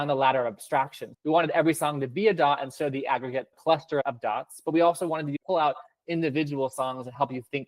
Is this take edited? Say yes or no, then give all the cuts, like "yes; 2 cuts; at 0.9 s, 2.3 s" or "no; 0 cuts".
yes; 1 cut; at 1.1 s